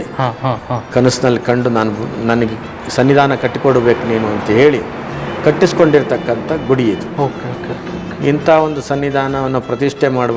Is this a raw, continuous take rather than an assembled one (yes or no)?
yes